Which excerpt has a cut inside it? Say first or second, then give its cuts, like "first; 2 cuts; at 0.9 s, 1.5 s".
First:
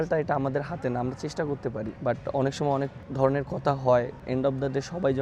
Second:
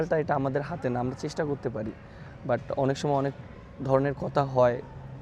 first; 3 cuts; at 1.9 s, 3.0 s, 4.2 s